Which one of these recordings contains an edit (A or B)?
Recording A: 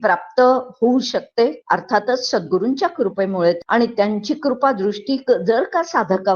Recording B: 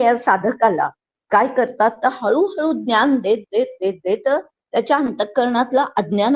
A